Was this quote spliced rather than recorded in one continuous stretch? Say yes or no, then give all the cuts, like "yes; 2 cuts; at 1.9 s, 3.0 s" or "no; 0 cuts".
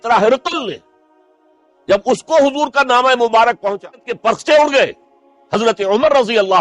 yes; 1 cut; at 4.1 s